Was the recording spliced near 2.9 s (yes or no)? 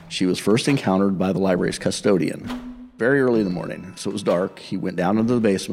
yes